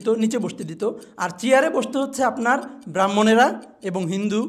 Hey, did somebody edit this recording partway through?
no; 0 cuts

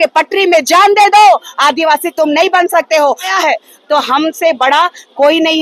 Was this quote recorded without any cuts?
no; 1 cut; at 3.3 s

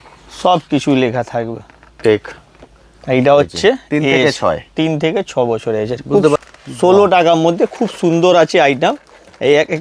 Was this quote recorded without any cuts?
no; 1 cut; at 6.4 s

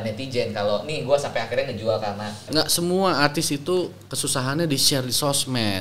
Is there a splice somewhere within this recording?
yes; 1 cut; at 2.5 s

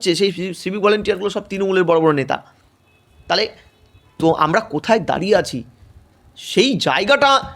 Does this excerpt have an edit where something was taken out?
no; 0 cuts

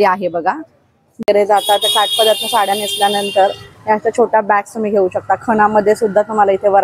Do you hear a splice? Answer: yes; 1 cut; at 1.2 s

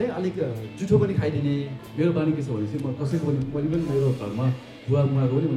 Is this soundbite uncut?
no; 1 cut; at 1.8 s

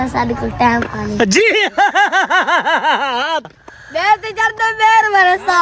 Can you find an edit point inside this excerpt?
yes; 1 cut; at 3.4 s

